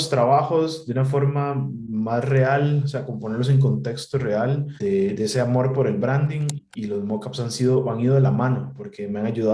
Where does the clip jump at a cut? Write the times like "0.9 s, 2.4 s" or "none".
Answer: 4.7 s, 6.6 s